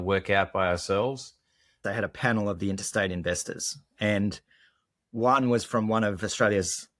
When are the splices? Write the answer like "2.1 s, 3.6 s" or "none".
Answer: 1.8 s

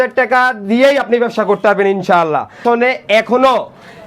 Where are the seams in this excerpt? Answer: 2.6 s

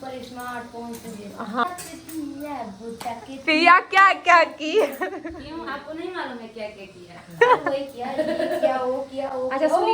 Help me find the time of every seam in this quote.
1.6 s

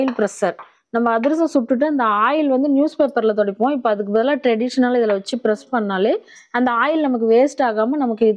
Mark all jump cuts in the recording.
none

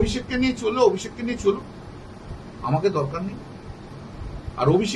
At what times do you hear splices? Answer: none

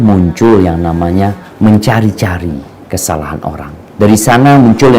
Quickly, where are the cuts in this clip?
3.8 s

